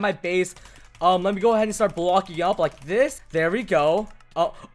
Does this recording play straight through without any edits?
no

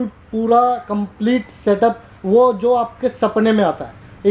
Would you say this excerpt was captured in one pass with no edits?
no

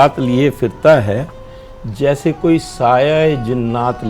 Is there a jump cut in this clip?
no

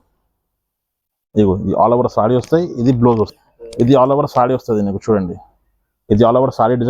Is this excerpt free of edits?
no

